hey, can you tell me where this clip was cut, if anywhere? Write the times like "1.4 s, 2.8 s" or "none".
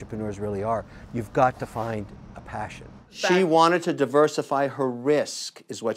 3.1 s